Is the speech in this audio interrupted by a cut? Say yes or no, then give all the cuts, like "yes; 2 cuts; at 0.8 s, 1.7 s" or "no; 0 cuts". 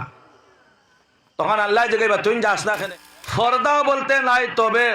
yes; 1 cut; at 2.8 s